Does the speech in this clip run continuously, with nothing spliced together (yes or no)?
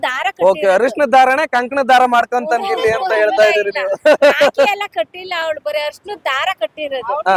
yes